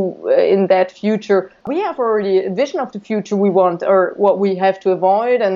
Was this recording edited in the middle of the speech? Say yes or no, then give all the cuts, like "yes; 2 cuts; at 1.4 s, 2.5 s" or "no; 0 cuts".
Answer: yes; 1 cut; at 1.7 s